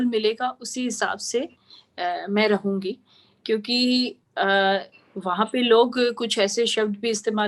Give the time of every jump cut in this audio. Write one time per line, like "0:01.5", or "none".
none

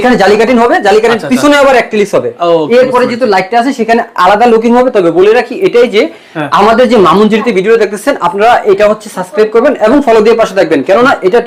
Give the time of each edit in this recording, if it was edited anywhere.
none

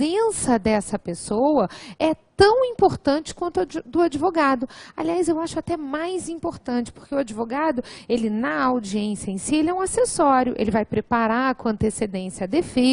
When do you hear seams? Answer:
none

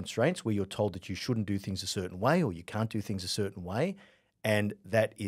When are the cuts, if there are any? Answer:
none

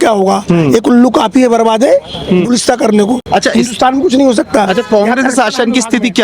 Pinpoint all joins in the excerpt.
none

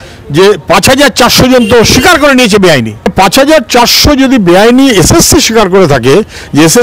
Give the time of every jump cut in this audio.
0:03.1

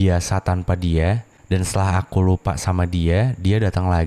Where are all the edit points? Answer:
0:01.3

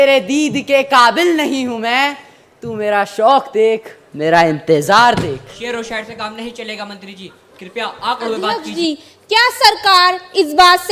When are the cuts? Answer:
0:08.5

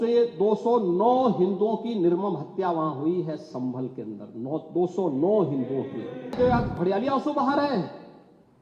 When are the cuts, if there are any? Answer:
0:06.4

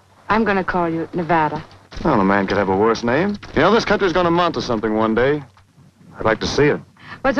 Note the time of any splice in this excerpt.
0:05.6

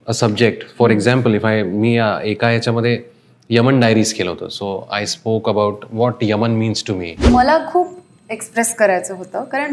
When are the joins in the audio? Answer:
0:07.1

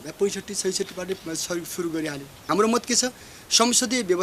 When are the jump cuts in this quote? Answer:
0:02.4

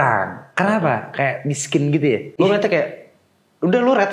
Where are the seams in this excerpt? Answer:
0:02.3

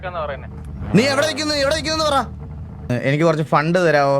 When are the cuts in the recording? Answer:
0:02.9

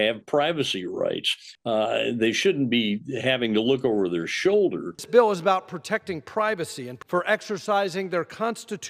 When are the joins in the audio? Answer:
0:04.9

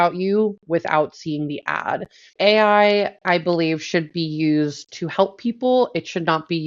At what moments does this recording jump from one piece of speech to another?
0:02.2

